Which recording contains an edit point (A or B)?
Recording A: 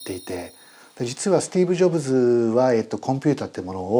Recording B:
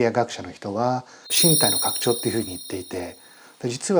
B